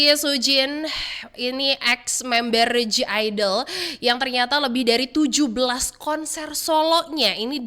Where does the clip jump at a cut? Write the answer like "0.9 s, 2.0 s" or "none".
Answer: none